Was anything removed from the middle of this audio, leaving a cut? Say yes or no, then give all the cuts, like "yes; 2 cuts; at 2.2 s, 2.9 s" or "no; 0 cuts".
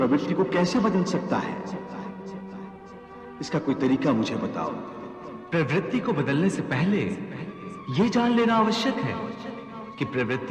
no; 0 cuts